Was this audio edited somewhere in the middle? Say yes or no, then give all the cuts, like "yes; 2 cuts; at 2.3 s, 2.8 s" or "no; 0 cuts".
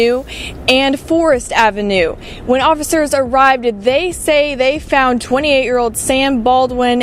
no; 0 cuts